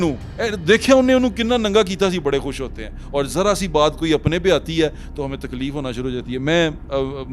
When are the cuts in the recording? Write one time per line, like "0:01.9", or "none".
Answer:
none